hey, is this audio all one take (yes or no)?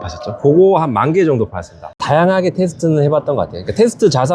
no